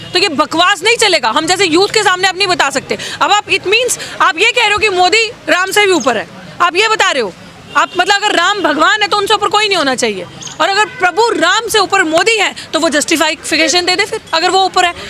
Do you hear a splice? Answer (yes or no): no